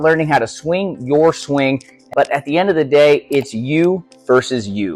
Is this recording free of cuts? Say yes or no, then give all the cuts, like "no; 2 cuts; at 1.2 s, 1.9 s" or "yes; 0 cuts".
no; 1 cut; at 2.1 s